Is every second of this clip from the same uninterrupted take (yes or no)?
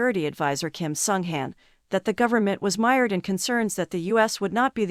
yes